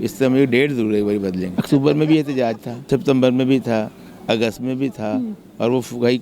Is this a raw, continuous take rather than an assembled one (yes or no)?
no